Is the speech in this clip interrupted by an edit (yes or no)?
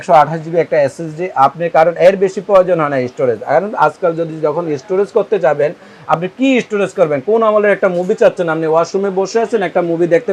no